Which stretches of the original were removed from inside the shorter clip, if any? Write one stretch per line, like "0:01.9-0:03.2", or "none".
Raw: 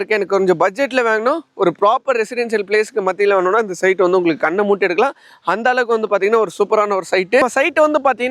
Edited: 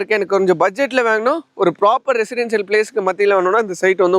none

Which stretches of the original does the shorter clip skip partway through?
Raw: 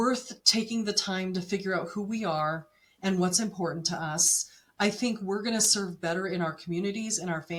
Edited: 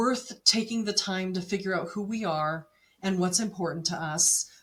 none

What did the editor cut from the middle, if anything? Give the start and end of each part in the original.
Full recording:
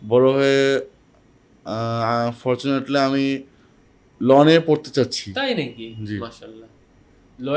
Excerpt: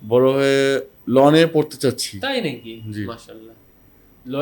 0:00.9-0:04.1

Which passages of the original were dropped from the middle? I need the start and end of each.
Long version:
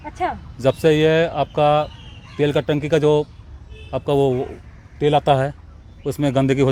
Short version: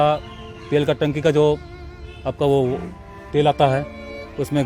none

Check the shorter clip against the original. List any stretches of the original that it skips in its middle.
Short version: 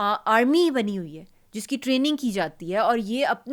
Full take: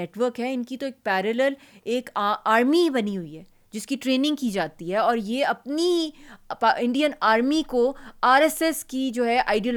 none

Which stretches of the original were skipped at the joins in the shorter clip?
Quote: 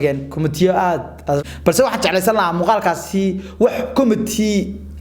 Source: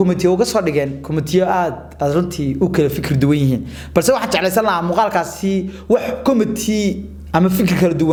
0:02.1-0:03.7

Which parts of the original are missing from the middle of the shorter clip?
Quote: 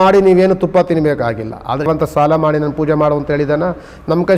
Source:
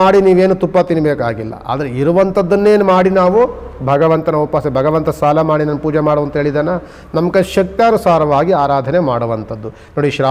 0:01.9-0:04.9

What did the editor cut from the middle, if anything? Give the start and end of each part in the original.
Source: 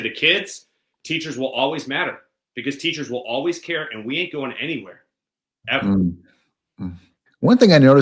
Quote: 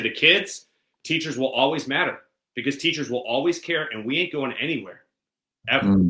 none

